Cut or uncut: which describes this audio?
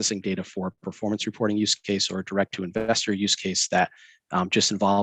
uncut